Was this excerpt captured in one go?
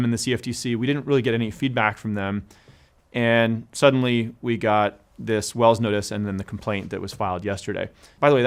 yes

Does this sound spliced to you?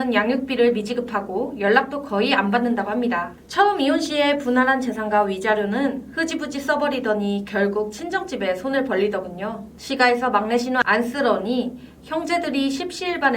yes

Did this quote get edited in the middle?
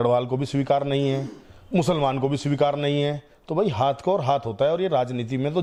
no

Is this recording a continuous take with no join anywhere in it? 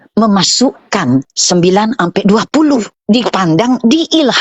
no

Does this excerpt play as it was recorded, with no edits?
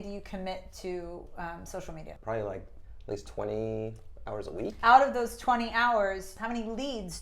no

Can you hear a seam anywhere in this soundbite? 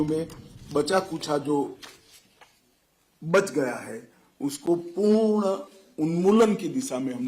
no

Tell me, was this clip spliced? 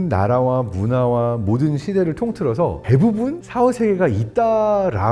yes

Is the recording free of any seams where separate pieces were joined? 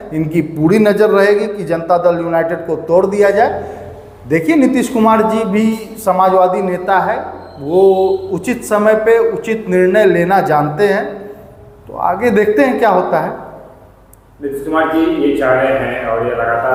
yes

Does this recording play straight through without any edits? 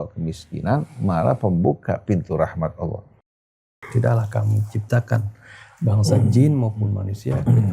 no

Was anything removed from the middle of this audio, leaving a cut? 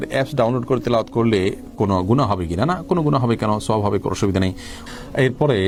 no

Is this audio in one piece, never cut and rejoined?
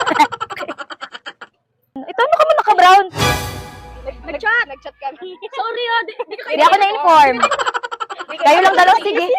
no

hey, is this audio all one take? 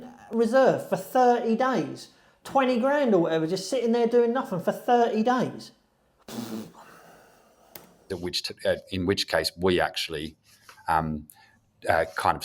yes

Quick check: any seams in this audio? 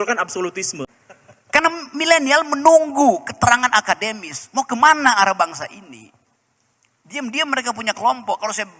yes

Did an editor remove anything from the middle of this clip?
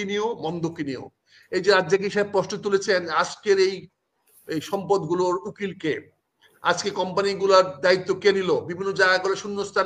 no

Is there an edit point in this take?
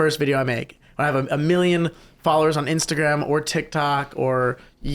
no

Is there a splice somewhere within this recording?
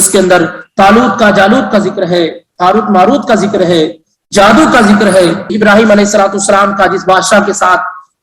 yes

